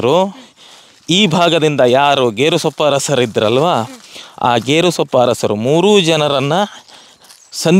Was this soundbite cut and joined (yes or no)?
no